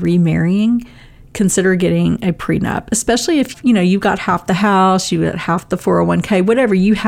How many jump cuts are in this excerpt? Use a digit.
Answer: 1